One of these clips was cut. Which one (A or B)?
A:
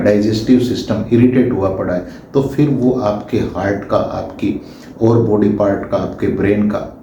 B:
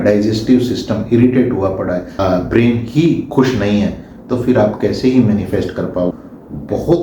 B